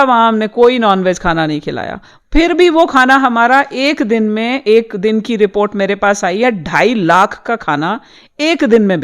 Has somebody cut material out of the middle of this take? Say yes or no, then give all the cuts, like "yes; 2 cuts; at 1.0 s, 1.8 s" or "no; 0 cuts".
no; 0 cuts